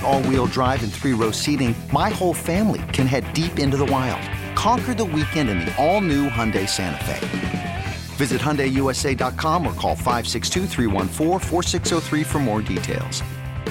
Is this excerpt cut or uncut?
uncut